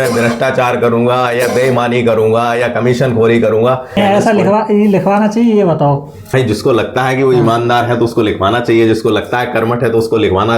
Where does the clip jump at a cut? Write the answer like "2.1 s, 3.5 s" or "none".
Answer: 4.0 s, 6.3 s